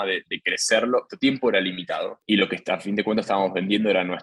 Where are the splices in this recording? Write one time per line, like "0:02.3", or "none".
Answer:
0:01.1
0:02.2